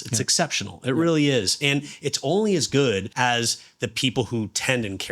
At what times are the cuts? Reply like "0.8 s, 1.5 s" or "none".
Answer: 3.1 s

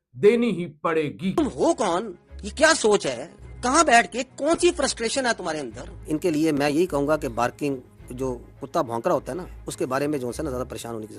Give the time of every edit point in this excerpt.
1.2 s

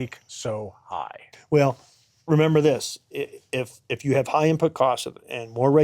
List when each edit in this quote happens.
1.3 s

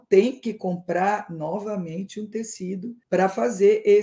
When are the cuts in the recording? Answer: 3.0 s

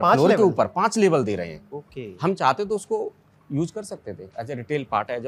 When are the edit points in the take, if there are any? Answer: none

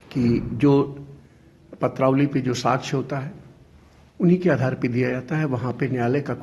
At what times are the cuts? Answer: none

